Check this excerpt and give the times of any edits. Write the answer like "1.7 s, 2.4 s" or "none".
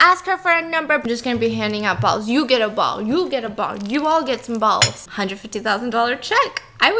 1.0 s, 5.0 s